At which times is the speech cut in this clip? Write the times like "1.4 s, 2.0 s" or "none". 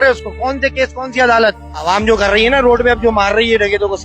1.7 s